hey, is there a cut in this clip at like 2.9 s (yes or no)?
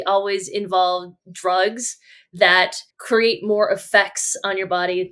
yes